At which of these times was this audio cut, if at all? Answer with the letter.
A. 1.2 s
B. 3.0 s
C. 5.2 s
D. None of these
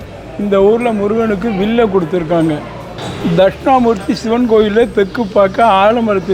B